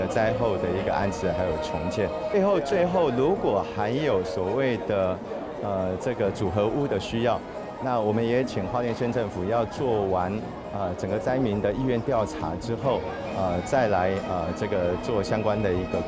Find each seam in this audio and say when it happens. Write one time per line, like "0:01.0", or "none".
0:02.3

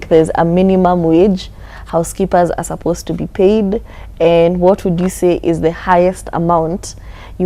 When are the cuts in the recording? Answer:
none

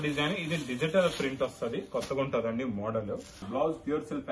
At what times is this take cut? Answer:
0:03.4

